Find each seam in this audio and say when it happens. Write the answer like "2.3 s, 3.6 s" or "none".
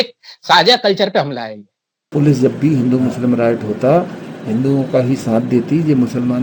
1.9 s